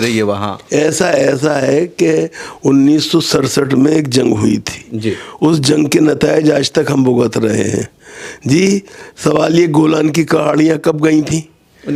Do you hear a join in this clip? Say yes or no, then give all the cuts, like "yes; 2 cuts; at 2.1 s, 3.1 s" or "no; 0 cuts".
no; 0 cuts